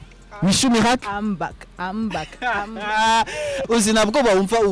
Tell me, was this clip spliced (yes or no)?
yes